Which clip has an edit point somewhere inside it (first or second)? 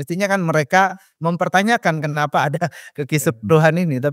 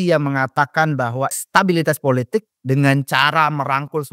second